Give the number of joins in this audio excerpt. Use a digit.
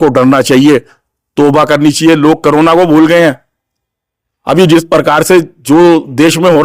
0